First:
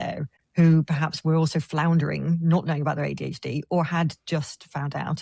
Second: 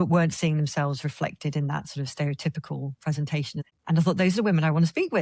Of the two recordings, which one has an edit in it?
second; 1 cut; at 3.6 s

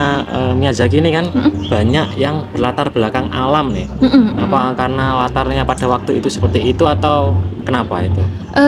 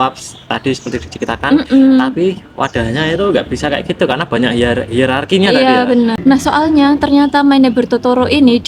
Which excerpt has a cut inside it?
second; 1 cut; at 6.2 s

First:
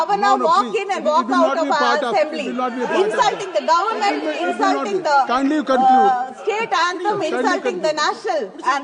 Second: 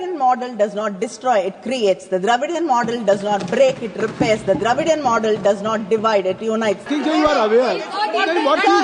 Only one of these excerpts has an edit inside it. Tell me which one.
second; 1 cut; at 6.9 s

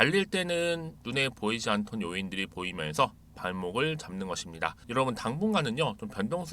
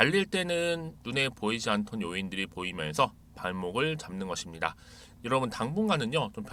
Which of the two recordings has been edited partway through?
first; 1 cut; at 4.8 s

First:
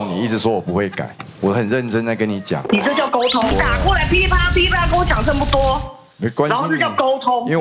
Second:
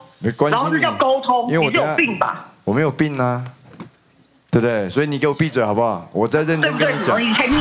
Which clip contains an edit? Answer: first; 1 cut; at 3.5 s

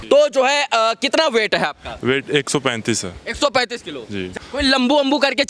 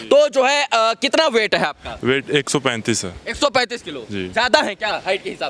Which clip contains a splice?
first; 1 cut; at 4.3 s

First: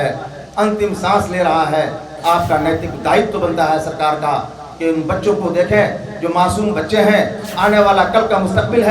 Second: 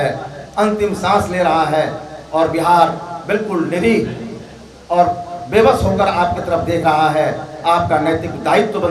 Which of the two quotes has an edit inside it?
first; 1 cut; at 2.1 s

